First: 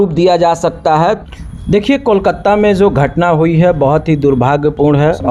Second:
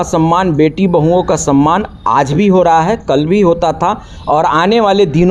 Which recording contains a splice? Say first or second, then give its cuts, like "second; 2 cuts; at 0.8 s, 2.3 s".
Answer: first; 1 cut; at 1.2 s